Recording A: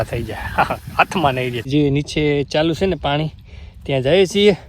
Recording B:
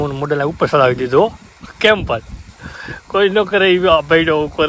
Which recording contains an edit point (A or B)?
A